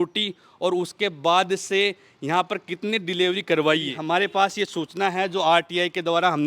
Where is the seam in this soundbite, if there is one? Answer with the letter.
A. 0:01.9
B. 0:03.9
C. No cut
B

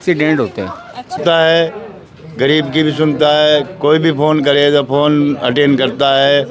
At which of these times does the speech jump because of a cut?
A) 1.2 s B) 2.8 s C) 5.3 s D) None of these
A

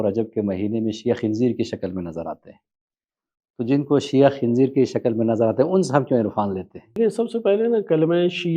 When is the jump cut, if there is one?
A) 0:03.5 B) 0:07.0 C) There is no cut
B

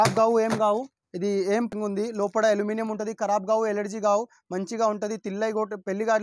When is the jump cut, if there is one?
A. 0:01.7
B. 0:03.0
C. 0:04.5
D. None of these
A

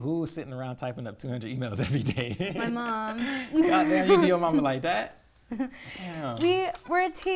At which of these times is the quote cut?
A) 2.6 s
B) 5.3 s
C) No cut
C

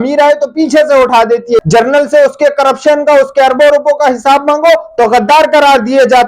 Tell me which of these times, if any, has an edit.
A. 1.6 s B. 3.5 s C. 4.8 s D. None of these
A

